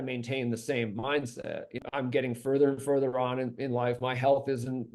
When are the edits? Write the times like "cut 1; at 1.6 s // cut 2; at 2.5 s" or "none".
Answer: cut 1; at 1.8 s